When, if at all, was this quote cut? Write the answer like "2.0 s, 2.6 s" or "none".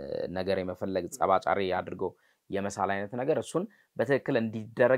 none